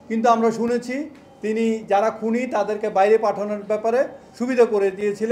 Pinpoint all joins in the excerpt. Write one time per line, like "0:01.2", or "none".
none

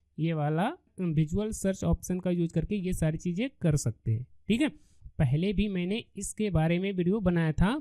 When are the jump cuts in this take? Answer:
0:05.0

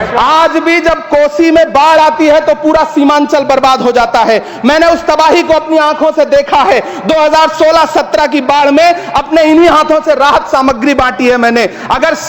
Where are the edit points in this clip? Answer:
none

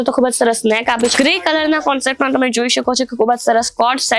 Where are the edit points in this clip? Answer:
0:01.1

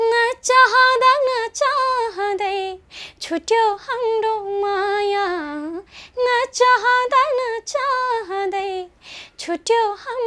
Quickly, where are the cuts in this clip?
none

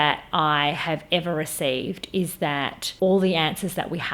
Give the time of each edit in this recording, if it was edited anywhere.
0:02.8

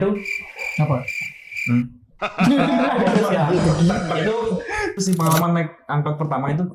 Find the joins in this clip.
0:05.0

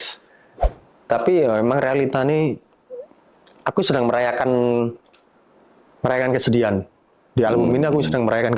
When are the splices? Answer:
none

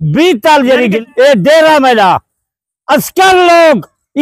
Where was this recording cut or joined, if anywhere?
0:01.0

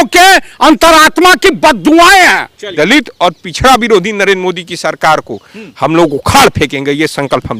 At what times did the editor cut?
0:02.6

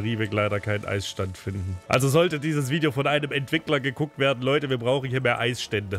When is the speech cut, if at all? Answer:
0:01.8

